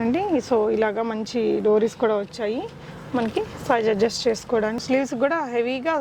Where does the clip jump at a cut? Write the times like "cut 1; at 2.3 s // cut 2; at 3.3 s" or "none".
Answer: cut 1; at 4.8 s